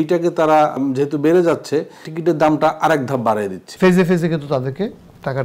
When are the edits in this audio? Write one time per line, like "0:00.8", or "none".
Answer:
0:00.8
0:02.1
0:03.6